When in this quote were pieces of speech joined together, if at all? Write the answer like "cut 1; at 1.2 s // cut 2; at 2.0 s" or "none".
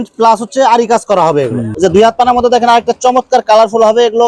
cut 1; at 1.6 s